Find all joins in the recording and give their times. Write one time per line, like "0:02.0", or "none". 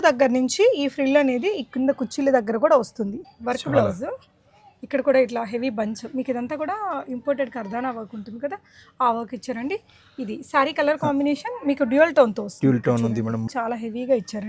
0:03.2
0:13.5